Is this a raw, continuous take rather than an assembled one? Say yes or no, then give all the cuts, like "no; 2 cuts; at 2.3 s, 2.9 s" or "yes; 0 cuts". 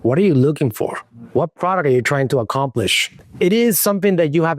no; 1 cut; at 3.1 s